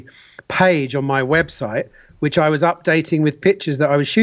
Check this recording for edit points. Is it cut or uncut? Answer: uncut